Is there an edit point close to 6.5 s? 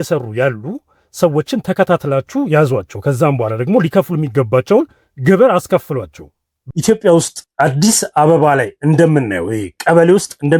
yes; 1 cut; at 6.5 s

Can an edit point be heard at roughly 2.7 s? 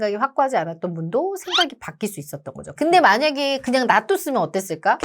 yes; 1 cut; at 2.7 s

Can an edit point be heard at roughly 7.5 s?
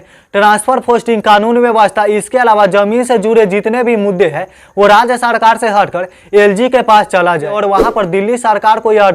yes; 1 cut; at 7.5 s

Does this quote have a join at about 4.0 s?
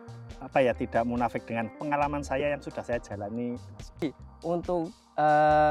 yes; 2 cuts; at 1.7 s, 4.0 s

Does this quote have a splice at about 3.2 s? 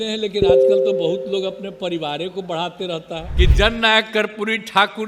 yes; 1 cut; at 3.2 s

